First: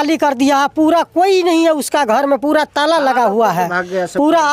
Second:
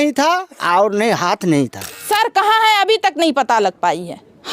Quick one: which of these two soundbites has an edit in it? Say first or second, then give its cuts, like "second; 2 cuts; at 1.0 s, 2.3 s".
second; 1 cut; at 1.8 s